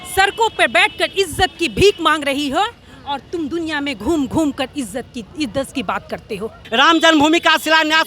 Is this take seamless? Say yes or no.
no